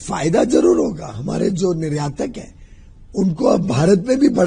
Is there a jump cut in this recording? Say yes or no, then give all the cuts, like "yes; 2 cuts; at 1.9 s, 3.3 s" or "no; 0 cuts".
no; 0 cuts